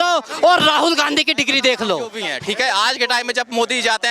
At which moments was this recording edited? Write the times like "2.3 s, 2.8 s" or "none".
2.3 s